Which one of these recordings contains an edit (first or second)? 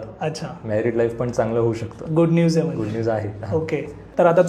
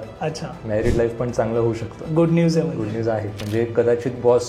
second